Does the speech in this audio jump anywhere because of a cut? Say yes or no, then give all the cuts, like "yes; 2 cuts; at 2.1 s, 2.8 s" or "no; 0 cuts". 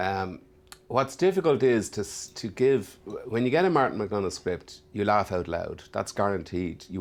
no; 0 cuts